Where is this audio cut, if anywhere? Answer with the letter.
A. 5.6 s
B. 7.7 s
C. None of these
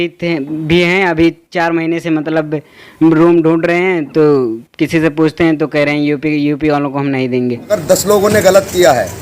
B